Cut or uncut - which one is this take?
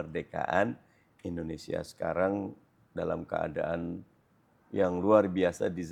uncut